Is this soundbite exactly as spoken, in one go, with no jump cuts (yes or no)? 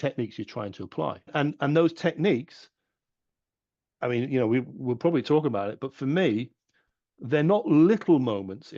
no